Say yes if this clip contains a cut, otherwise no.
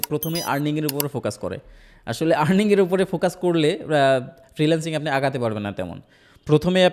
no